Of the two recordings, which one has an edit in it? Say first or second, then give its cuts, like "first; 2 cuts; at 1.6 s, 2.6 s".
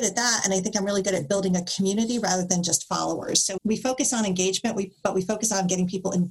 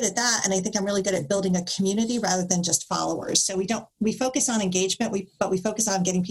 first; 1 cut; at 3.5 s